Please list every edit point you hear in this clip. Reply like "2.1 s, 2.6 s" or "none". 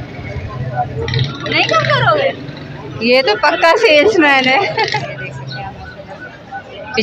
5.0 s